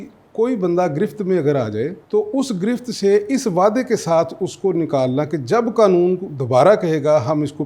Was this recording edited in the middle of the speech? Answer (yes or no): yes